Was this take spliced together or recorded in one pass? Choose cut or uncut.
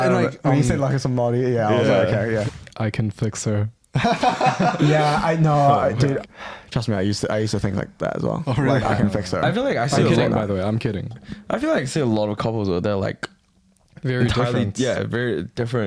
cut